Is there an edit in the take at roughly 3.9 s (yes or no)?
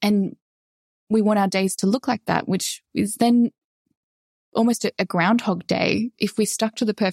no